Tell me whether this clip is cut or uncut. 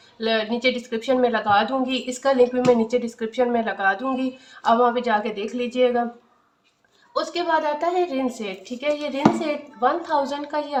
uncut